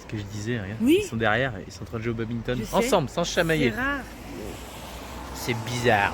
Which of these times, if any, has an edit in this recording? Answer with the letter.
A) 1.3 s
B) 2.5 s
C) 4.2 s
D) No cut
D